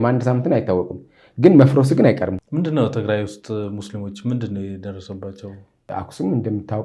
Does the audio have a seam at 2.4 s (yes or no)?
yes